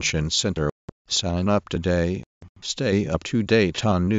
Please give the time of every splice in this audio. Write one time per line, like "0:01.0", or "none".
0:00.9